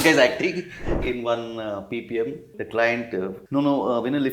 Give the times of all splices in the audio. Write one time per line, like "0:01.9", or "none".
0:01.1
0:02.5
0:03.4